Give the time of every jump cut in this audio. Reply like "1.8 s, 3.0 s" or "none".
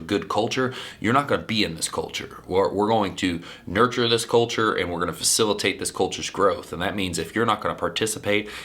none